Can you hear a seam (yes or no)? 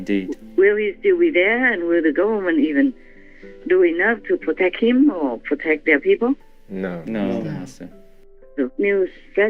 yes